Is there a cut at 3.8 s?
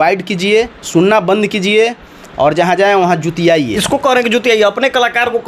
yes; 1 cut; at 3.8 s

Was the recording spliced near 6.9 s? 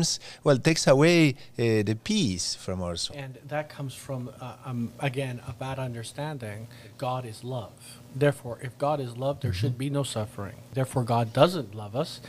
yes; 3 cuts; at 3.3 s, 6.9 s, 10.6 s

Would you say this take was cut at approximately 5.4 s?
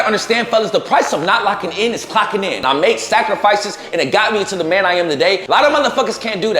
yes; 2 cuts; at 2.6 s, 5.4 s

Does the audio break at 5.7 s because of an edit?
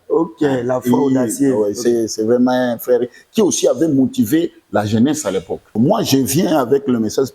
yes; 1 cut; at 5.7 s

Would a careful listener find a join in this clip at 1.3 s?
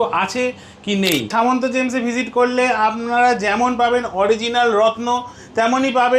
yes; 1 cut; at 1.3 s

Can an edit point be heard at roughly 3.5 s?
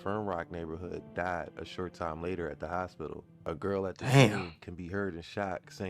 yes; 1 cut; at 3.5 s

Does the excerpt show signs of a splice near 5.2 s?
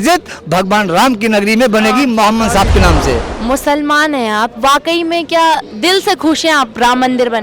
no; 1 cut; at 3.3 s

